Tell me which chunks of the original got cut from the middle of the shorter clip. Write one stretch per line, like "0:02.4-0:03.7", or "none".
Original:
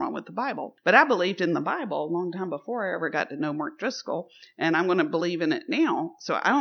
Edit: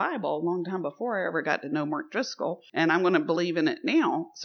0:04.3-0:04.5